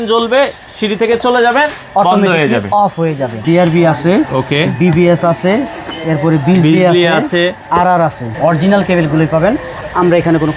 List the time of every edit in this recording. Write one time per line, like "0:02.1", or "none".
0:03.4
0:08.3